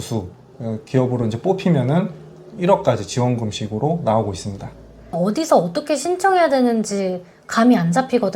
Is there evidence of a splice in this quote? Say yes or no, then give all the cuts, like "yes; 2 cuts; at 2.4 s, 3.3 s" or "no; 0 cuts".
yes; 1 cut; at 5.1 s